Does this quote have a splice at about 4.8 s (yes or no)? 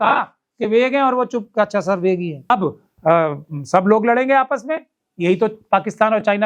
no